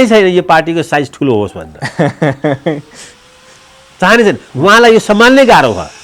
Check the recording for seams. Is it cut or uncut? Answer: uncut